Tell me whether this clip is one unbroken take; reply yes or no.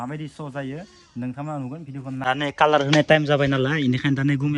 no